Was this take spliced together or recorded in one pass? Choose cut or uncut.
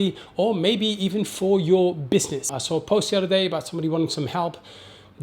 cut